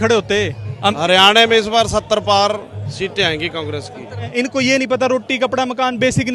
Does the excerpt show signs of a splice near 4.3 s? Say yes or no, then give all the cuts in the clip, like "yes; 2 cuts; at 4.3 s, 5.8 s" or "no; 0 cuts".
yes; 2 cuts; at 0.9 s, 4.3 s